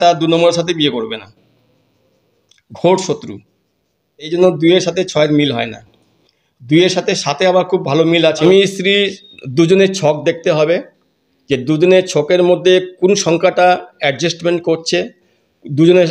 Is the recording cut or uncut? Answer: cut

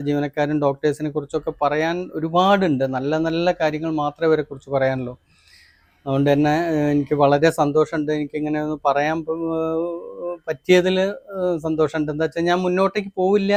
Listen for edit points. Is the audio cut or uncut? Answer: uncut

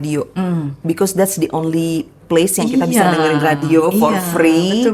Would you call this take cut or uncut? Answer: uncut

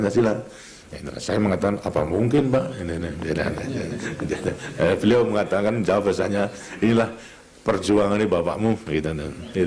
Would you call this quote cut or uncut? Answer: uncut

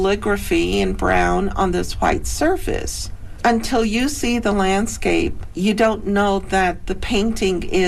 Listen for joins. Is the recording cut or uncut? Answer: uncut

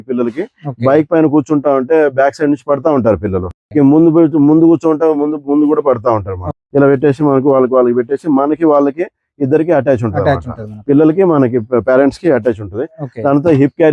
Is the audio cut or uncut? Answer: uncut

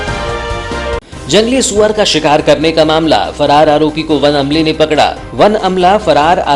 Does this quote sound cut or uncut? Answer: cut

